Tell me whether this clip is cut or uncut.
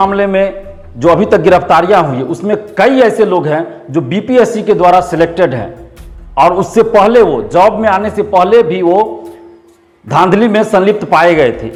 uncut